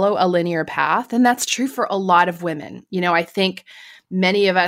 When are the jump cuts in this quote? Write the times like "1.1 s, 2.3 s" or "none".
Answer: none